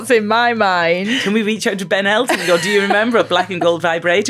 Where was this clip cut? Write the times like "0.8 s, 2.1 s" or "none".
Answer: 1.2 s